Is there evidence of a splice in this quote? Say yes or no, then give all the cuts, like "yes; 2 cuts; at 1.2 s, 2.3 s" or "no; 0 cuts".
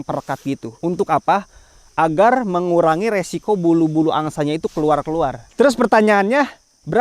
yes; 1 cut; at 5.4 s